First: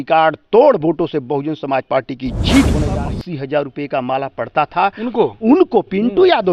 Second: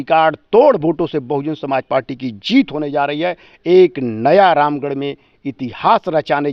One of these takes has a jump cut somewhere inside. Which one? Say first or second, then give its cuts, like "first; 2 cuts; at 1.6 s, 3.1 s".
first; 1 cut; at 2.9 s